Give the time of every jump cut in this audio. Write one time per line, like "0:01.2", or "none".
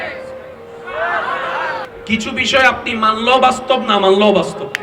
0:01.9